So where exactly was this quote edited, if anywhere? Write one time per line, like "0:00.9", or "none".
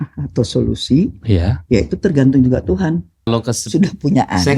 0:03.3